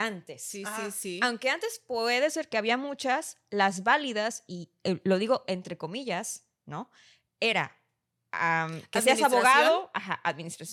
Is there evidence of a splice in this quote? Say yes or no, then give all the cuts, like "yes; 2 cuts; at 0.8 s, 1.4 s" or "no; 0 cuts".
no; 0 cuts